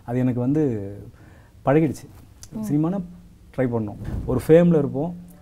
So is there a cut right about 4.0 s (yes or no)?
yes